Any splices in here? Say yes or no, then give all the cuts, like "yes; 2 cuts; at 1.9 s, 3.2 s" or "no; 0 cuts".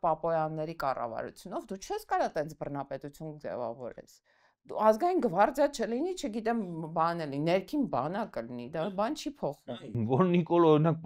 yes; 1 cut; at 9.7 s